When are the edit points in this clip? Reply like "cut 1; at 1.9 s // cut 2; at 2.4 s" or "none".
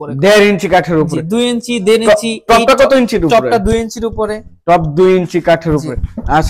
none